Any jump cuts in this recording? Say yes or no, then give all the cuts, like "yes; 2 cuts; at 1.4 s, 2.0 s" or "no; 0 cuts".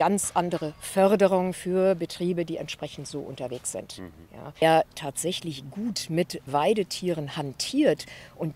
yes; 1 cut; at 4.6 s